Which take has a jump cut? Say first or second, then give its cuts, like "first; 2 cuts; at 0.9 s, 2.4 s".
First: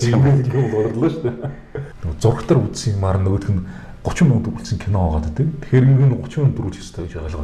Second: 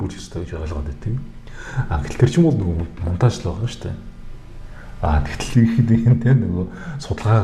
first; 1 cut; at 1.9 s